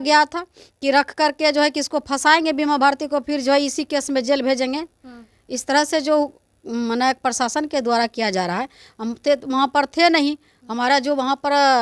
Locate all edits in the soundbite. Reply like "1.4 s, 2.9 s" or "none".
none